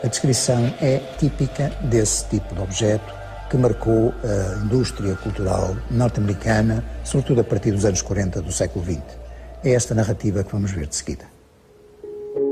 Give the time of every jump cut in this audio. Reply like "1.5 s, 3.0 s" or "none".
none